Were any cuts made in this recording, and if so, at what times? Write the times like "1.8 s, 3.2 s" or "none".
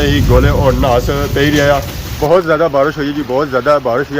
2.0 s